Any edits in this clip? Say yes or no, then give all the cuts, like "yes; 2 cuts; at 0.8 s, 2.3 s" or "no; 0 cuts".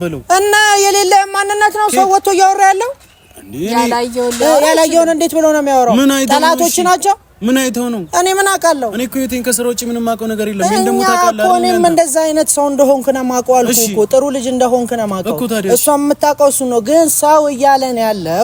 no; 0 cuts